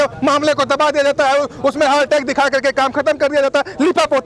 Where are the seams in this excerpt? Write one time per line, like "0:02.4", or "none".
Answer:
none